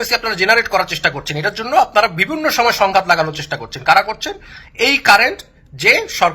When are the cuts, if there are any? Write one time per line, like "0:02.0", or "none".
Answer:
none